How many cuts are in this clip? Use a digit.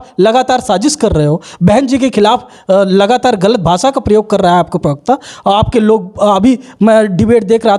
0